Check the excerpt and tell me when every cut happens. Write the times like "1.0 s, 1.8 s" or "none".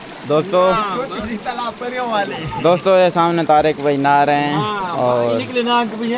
none